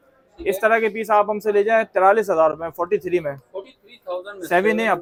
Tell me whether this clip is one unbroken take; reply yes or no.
yes